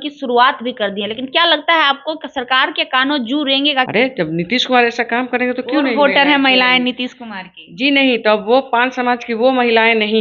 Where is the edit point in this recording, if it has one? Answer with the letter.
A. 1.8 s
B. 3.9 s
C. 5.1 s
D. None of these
B